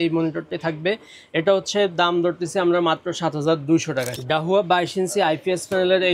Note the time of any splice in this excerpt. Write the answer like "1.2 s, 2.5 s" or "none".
4.1 s